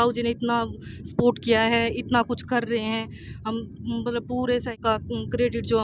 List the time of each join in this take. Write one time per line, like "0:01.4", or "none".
0:04.8